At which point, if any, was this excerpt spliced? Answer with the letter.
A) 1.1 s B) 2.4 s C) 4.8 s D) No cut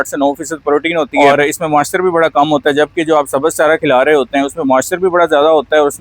A